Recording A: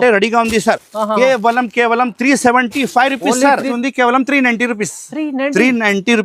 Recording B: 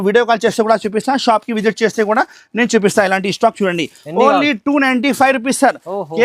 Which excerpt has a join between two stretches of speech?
A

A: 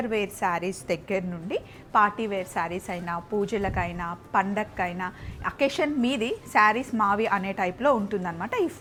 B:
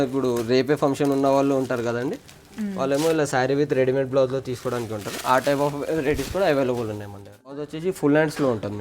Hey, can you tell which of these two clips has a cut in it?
B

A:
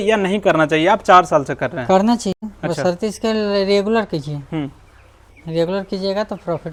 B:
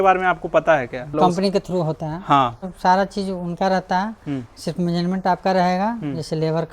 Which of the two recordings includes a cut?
B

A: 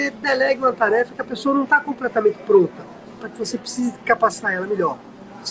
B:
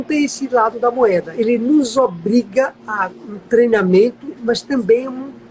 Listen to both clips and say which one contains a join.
B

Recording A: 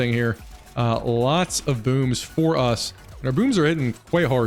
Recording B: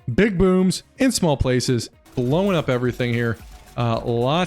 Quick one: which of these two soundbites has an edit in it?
B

